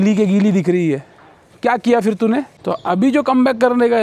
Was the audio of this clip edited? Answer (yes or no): yes